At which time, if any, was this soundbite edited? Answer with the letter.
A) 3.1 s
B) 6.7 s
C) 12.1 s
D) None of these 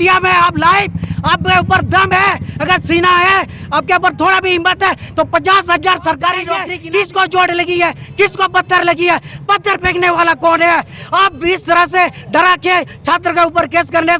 B